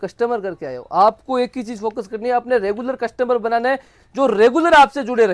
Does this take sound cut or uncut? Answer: uncut